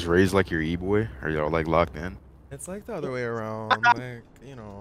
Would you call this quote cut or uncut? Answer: uncut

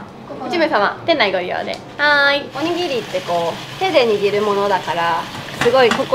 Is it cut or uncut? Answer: cut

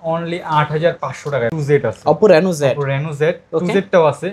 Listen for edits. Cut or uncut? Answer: cut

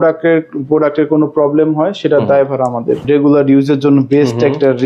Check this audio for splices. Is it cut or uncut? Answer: cut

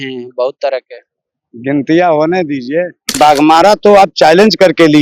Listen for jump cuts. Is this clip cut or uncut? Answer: cut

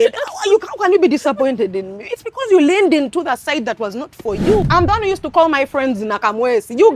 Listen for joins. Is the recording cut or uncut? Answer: cut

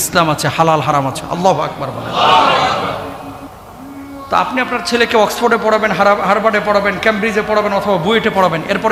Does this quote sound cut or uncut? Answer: uncut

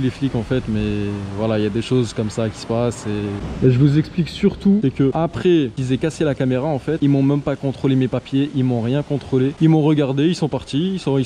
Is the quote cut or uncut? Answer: uncut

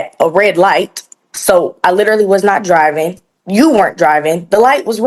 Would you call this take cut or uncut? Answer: uncut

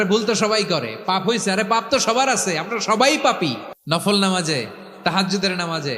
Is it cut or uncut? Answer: cut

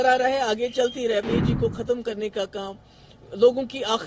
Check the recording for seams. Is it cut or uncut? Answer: cut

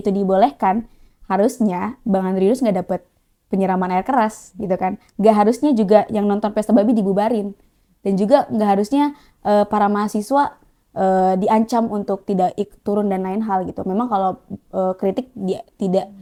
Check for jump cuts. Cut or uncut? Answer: uncut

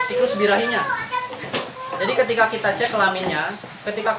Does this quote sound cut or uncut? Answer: uncut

